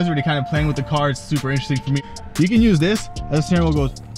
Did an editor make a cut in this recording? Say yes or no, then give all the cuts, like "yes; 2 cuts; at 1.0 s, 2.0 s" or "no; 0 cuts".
yes; 1 cut; at 2.0 s